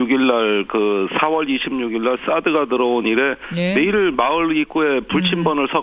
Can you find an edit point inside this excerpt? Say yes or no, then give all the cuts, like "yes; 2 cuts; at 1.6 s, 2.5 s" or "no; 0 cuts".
yes; 1 cut; at 2.5 s